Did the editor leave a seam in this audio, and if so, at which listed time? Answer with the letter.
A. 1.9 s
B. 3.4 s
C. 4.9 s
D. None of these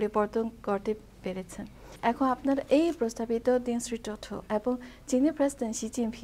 A